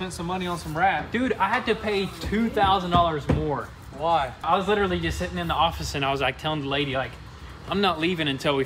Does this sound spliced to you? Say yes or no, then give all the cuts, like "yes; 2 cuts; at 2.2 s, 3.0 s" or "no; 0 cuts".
yes; 1 cut; at 4.5 s